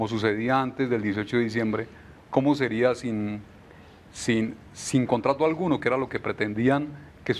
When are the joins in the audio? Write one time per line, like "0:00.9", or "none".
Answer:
none